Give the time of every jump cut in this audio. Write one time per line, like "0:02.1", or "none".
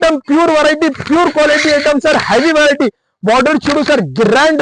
none